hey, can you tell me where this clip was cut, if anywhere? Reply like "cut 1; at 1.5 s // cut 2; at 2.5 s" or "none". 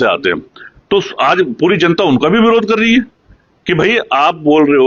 none